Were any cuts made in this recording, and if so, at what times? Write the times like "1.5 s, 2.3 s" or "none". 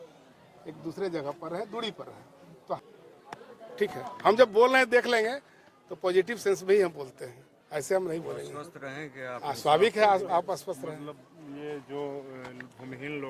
2.8 s